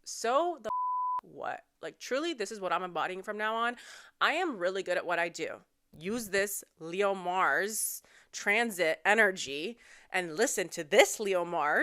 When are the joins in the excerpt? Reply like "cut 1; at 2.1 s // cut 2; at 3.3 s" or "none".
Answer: cut 1; at 5.9 s